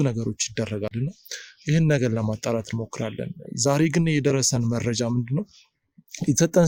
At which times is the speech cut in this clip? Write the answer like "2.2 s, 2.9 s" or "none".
none